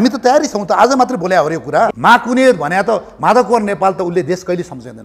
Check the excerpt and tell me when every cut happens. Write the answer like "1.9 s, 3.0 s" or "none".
1.9 s